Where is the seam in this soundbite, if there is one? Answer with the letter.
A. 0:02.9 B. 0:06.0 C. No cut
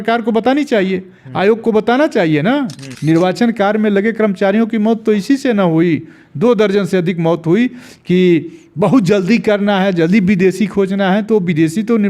A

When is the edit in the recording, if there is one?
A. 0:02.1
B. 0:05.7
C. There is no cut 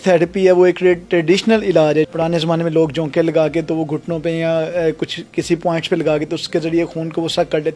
A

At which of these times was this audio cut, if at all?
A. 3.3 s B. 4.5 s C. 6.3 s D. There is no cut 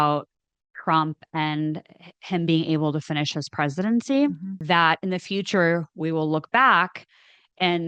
B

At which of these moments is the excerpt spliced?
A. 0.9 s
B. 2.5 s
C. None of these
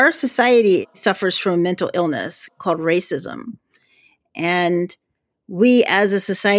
A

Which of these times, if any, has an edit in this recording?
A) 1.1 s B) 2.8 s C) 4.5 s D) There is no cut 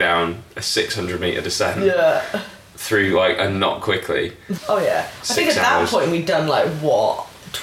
C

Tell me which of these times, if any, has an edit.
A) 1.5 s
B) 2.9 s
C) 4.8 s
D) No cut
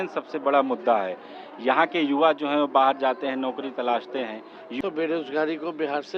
C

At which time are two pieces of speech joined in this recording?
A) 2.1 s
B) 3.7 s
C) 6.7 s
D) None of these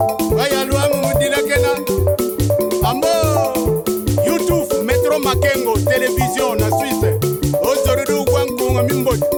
D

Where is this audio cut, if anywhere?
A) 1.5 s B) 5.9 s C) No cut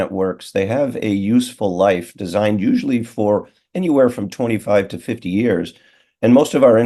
C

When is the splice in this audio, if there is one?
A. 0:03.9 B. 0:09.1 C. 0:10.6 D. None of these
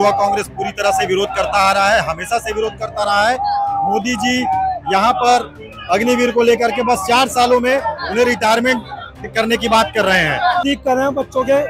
C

